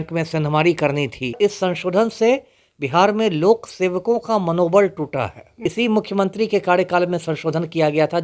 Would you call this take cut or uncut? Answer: cut